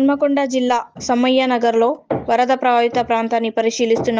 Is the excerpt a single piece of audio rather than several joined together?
yes; 0 cuts

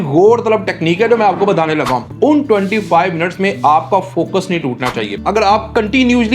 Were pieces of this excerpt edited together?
yes; 2 cuts; at 2.0 s, 5.1 s

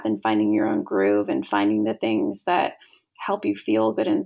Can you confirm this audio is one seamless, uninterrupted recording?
yes; 0 cuts

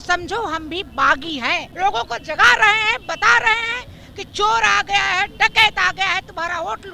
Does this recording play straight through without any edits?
no; 1 cut; at 1.7 s

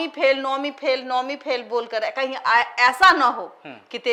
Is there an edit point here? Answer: no; 0 cuts

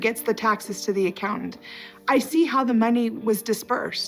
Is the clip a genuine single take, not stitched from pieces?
yes; 0 cuts

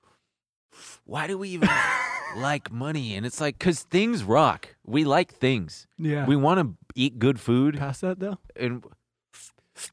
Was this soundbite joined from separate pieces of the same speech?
yes; 1 cut; at 2.1 s

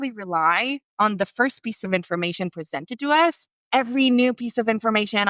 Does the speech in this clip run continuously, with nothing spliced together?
no; 2 cuts; at 0.8 s, 3.5 s

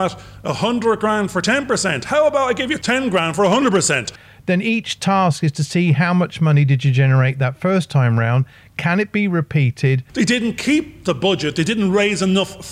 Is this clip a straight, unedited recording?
no; 3 cuts; at 2.8 s, 4.2 s, 10.0 s

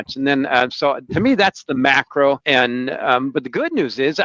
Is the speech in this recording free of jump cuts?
no; 1 cut; at 2.4 s

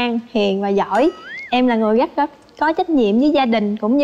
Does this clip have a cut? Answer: no; 0 cuts

